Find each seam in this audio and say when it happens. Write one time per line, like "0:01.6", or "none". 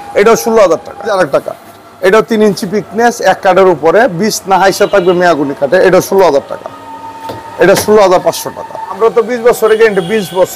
0:01.1
0:09.0